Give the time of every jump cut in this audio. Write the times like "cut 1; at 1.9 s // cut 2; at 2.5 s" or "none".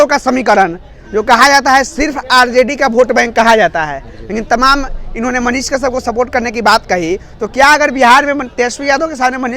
none